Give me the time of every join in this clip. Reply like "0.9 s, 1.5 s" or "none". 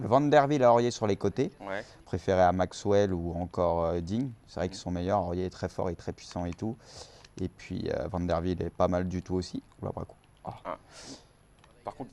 9.5 s